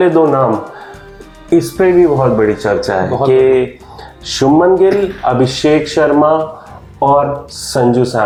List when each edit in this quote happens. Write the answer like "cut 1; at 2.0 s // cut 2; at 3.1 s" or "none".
none

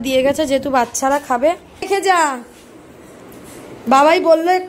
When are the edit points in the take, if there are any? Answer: cut 1; at 1.8 s

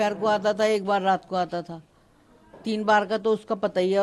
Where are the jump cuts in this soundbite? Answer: none

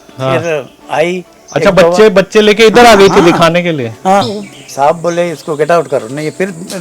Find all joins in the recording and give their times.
cut 1; at 4.3 s

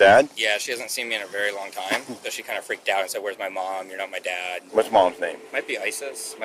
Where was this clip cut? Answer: cut 1; at 2.3 s // cut 2; at 4.7 s // cut 3; at 5.5 s

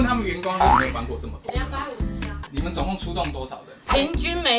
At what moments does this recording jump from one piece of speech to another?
cut 1; at 2.4 s

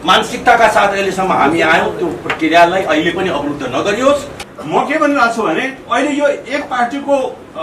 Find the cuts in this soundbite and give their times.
cut 1; at 4.4 s

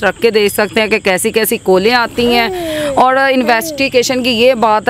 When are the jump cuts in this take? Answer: none

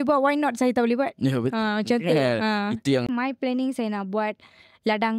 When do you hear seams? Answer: cut 1; at 3.1 s

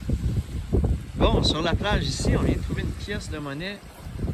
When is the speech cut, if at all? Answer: none

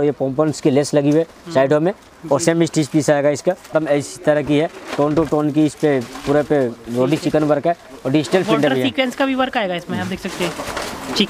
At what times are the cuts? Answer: cut 1; at 3.6 s

